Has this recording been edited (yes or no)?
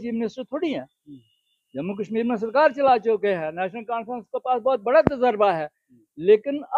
no